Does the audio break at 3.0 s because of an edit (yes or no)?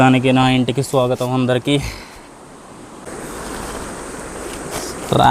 yes